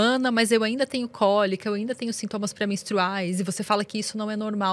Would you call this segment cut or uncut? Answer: uncut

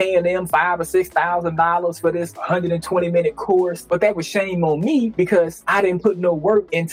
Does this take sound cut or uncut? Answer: cut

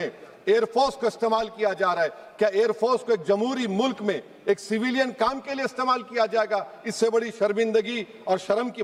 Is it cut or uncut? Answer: uncut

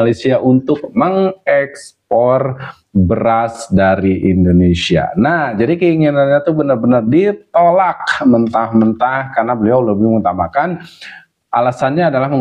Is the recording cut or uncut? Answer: uncut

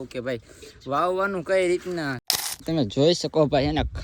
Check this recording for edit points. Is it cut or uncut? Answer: cut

